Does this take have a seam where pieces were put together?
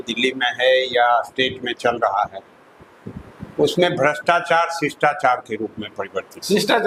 no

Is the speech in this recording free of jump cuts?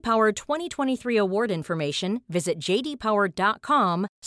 yes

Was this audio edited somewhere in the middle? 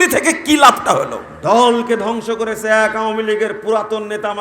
yes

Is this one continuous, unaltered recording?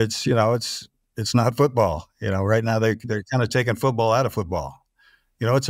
yes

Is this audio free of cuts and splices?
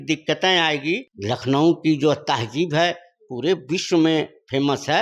no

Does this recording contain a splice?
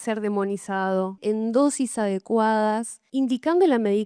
yes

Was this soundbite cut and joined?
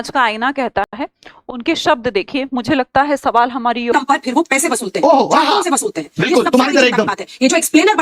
yes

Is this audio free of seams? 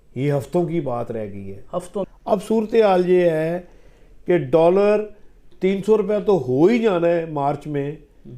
no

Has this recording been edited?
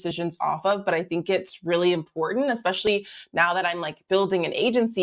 no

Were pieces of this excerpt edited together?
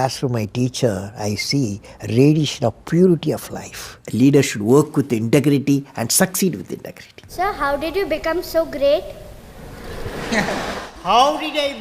yes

